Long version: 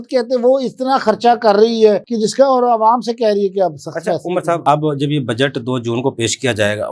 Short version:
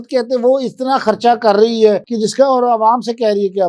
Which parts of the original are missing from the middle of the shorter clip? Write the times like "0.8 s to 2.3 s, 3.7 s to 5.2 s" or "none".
none